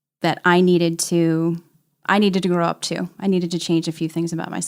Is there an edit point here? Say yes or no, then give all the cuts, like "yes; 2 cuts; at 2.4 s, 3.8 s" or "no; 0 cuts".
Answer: no; 0 cuts